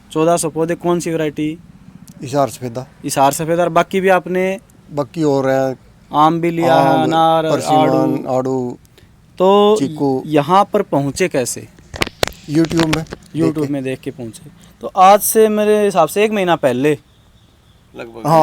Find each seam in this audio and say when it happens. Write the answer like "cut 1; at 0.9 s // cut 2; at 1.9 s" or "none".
none